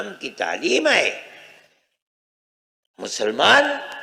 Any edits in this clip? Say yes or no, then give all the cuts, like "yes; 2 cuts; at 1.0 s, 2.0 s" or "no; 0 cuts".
no; 0 cuts